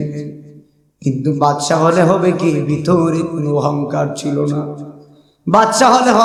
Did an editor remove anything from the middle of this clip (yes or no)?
no